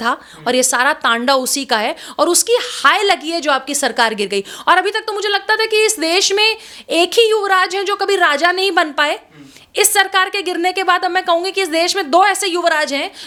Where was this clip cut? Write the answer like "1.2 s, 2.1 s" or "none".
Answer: none